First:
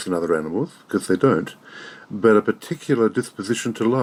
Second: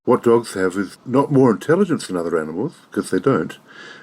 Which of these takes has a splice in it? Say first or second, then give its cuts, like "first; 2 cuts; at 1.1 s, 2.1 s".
second; 1 cut; at 0.9 s